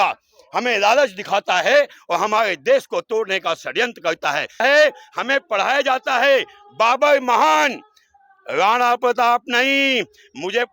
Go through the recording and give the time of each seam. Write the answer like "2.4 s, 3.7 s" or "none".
4.6 s